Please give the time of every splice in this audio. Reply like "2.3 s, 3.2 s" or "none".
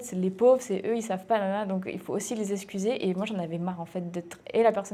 none